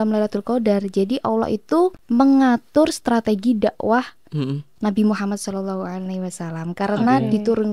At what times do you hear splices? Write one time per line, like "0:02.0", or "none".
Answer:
0:02.0